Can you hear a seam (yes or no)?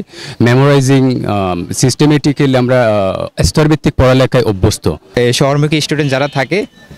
yes